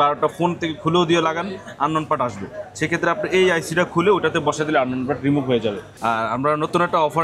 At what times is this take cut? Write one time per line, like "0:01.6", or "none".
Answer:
0:05.9